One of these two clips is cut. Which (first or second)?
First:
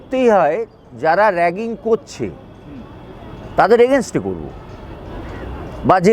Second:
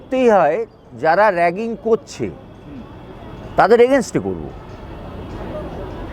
first